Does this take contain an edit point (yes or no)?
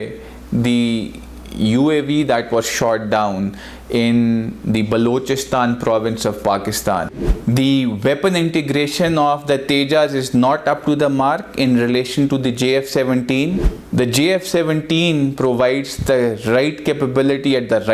yes